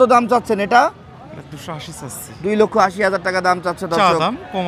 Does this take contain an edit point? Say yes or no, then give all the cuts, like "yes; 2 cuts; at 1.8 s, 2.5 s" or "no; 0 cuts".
no; 0 cuts